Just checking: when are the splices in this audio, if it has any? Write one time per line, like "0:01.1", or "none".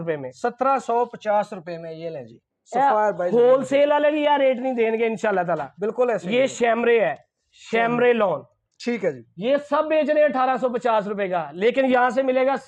none